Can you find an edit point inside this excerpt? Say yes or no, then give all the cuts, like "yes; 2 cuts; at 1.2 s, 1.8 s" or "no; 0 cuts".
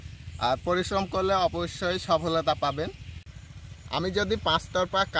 yes; 1 cut; at 3.3 s